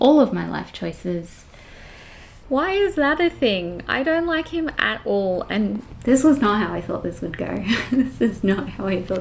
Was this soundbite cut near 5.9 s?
yes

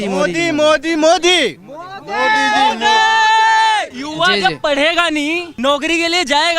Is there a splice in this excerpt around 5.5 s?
yes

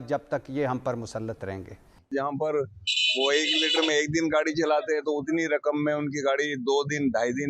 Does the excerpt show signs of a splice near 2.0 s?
yes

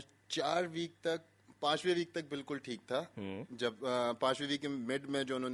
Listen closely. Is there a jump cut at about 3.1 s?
no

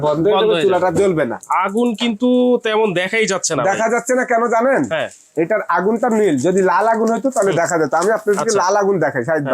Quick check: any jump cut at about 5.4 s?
no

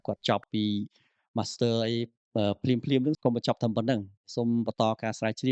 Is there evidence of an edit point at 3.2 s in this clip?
yes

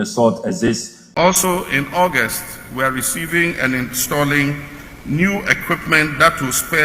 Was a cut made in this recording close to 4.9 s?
no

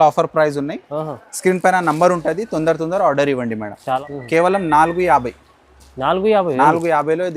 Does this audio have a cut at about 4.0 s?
yes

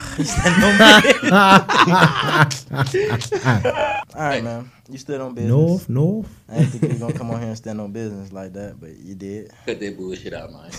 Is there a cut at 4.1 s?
yes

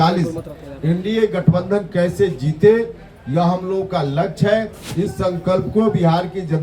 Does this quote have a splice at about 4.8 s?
yes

